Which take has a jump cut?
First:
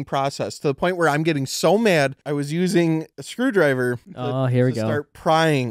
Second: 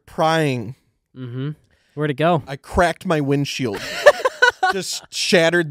first; 3 cuts; at 2.2 s, 3.2 s, 4.1 s

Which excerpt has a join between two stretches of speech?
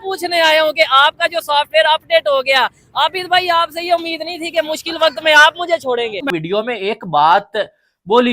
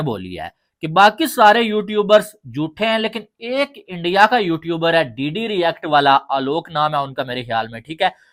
first; 1 cut; at 6.3 s

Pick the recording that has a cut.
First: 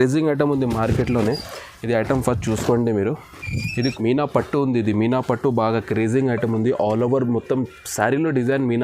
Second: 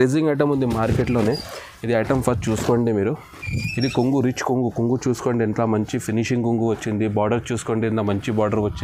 first; 1 cut; at 3.7 s

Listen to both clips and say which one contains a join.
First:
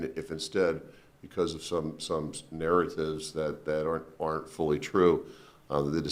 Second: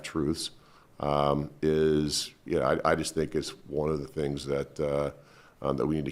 second; 1 cut; at 1.4 s

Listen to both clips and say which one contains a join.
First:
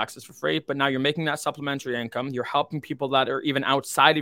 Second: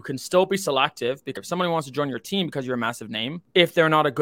second; 2 cuts; at 1.4 s, 3.4 s

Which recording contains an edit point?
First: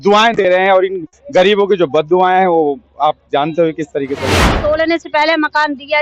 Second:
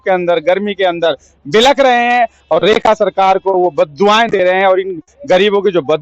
first; 1 cut; at 4.5 s

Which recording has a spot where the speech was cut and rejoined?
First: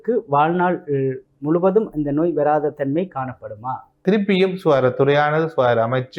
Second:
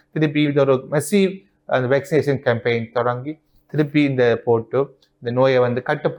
first; 1 cut; at 4.0 s

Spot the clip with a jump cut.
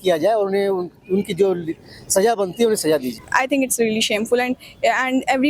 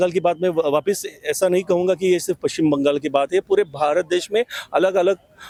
first; 1 cut; at 3.1 s

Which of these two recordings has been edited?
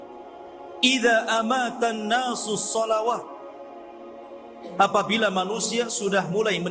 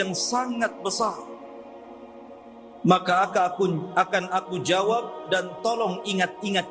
second; 2 cuts; at 1.3 s, 2.8 s

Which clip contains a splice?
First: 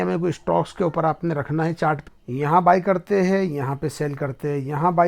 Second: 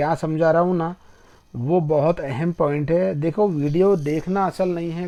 first; 1 cut; at 2.0 s

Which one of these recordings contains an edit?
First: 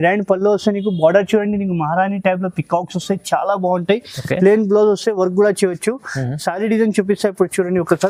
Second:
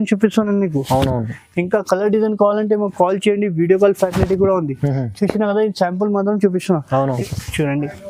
second; 1 cut; at 7.1 s

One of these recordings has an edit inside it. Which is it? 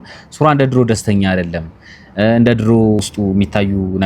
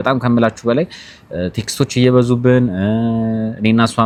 first; 1 cut; at 3.0 s

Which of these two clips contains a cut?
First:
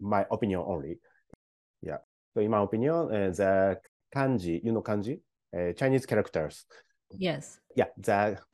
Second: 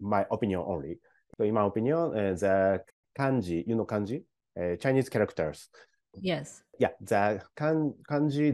second; 1 cut; at 1.2 s

